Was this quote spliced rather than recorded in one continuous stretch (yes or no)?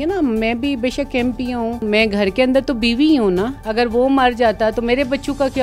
yes